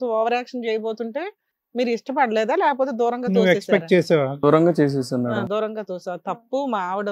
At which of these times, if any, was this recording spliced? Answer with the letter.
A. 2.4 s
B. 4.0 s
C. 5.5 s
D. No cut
D